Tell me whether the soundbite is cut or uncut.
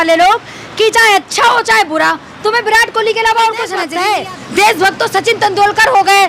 cut